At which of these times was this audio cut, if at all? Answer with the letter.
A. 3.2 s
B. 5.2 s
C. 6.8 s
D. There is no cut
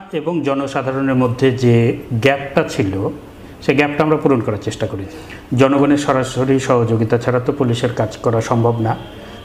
B